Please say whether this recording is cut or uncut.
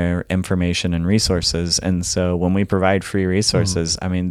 uncut